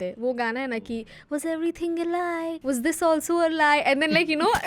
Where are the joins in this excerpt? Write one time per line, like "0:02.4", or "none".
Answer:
0:02.6